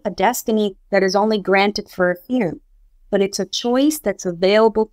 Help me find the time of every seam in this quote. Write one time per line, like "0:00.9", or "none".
none

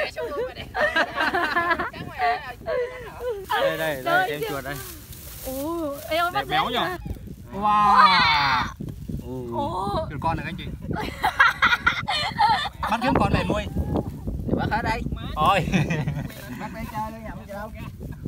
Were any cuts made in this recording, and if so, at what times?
0:03.4
0:07.1

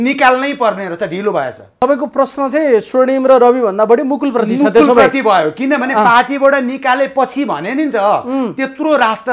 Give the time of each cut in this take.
0:01.6

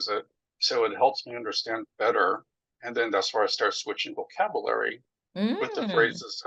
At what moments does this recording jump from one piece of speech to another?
none

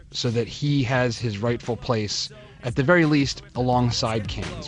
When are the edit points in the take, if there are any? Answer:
0:02.8

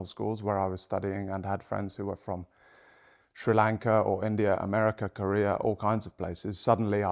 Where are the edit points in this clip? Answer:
none

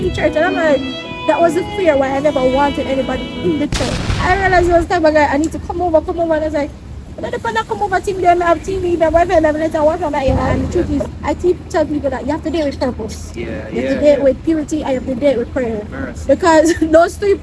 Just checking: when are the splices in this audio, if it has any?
0:04.1
0:10.5

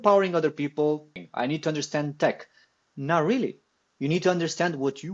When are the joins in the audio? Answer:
0:01.1

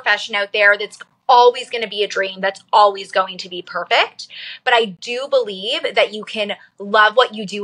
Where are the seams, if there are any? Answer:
none

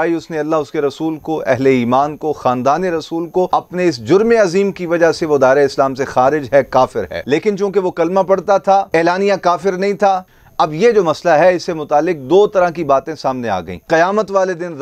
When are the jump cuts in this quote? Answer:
0:03.5
0:07.1
0:10.2
0:13.7

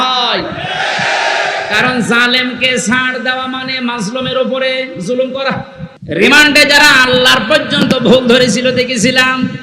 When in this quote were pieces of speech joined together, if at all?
0:05.9

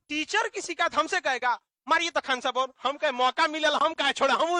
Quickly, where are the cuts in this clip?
none

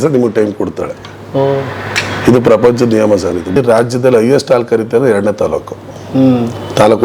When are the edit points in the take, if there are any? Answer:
0:03.6

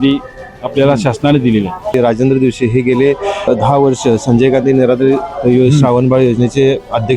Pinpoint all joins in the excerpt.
0:01.9
0:03.5

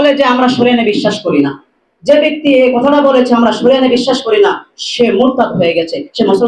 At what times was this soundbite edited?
none

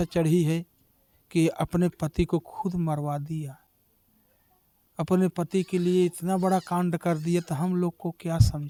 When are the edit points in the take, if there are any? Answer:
none

